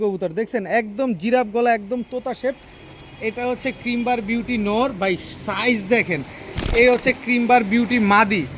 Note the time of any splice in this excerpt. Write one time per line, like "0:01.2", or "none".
none